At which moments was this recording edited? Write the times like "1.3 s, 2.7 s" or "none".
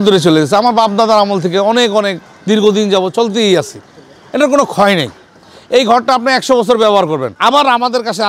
7.3 s